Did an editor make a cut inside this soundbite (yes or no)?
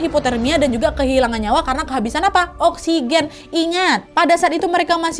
no